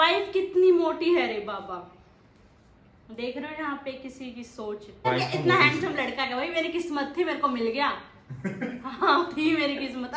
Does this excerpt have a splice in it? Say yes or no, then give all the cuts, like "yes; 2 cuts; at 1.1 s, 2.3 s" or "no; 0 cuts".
yes; 1 cut; at 5.1 s